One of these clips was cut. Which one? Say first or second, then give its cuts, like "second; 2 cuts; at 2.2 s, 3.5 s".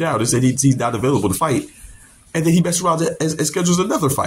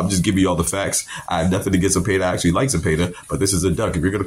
first; 1 cut; at 1.6 s